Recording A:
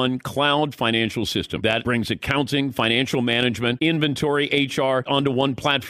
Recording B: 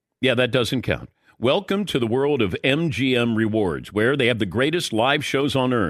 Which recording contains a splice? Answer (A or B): A